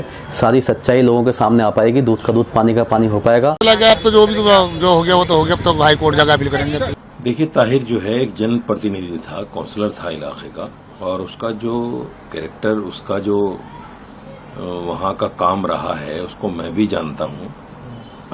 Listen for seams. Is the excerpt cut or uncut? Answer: cut